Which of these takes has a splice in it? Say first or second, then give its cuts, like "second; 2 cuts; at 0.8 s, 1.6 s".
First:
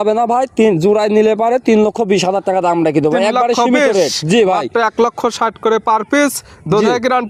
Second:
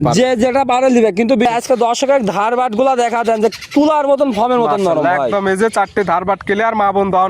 second; 1 cut; at 1.4 s